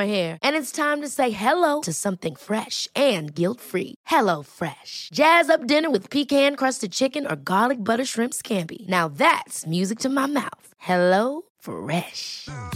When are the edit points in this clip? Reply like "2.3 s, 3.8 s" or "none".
none